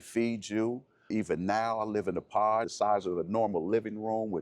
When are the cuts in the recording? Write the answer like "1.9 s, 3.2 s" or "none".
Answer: 1.1 s, 2.7 s

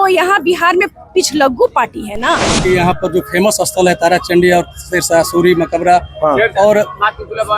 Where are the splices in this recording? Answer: 2.6 s

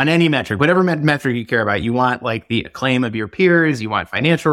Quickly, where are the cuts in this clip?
none

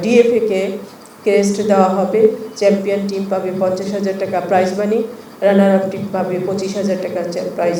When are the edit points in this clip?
none

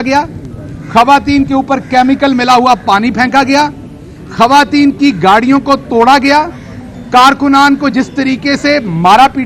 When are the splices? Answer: none

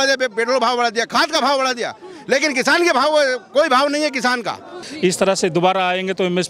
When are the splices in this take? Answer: 4.8 s

